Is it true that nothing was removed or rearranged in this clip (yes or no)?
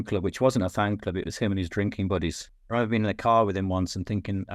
no